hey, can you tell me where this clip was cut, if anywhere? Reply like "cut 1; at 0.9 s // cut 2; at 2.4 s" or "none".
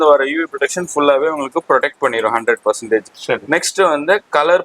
none